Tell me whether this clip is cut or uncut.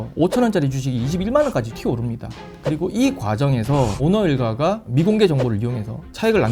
cut